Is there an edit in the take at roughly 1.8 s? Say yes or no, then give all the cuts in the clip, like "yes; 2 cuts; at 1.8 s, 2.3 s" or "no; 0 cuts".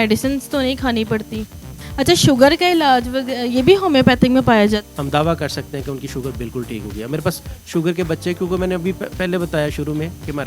yes; 2 cuts; at 1.8 s, 4.9 s